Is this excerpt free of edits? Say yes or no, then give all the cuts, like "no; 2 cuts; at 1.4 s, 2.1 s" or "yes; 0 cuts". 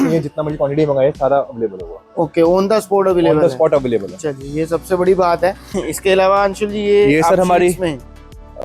yes; 0 cuts